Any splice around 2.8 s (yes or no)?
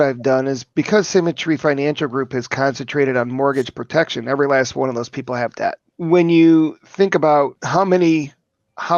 no